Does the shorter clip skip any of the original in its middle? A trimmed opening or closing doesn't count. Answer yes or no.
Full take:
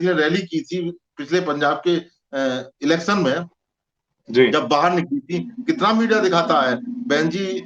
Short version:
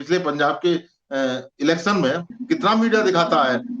yes